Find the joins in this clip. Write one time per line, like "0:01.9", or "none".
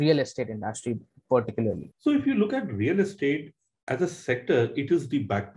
0:01.9